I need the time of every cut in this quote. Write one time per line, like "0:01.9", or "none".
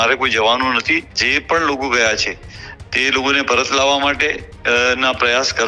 0:01.2